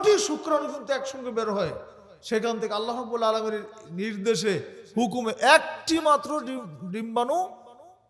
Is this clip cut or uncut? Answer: uncut